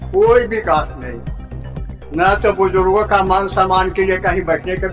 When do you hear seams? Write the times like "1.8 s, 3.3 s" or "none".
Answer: none